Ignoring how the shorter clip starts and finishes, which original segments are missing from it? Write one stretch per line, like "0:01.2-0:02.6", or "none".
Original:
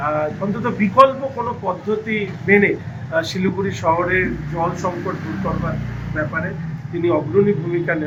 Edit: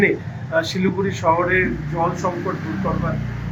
none